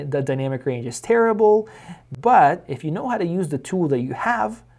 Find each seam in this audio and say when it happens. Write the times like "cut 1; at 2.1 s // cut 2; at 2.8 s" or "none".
cut 1; at 2.1 s